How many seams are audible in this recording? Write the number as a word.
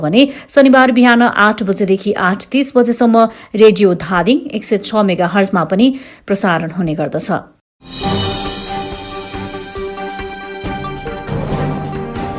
one